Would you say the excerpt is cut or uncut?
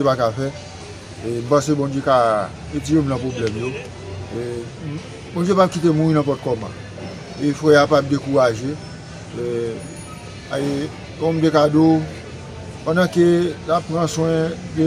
uncut